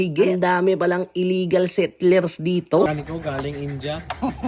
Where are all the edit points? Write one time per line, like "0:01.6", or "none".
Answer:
0:02.9